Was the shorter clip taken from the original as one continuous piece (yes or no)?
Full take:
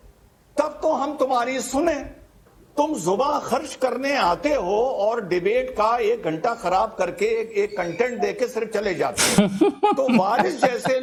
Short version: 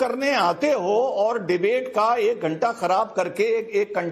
yes